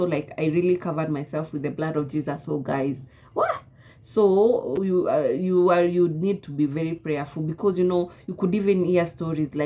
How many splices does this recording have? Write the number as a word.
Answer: zero